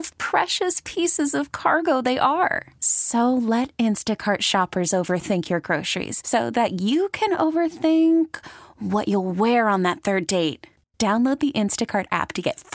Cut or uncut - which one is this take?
uncut